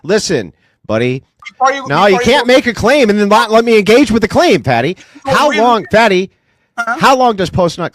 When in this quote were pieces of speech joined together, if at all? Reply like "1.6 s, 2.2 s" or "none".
1.4 s